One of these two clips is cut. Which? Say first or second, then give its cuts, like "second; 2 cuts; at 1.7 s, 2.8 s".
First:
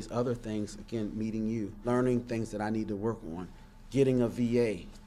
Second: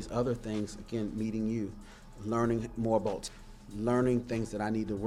first; 1 cut; at 1.8 s